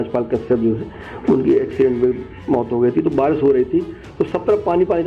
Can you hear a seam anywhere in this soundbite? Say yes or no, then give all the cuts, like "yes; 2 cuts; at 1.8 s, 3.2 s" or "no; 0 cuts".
no; 0 cuts